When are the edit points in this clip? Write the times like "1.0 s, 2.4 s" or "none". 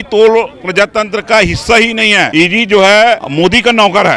2.3 s, 3.3 s